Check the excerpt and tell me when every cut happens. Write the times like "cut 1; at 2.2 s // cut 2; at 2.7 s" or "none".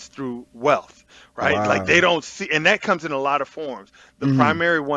none